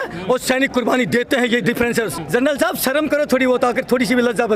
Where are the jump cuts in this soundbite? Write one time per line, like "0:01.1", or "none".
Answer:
0:02.2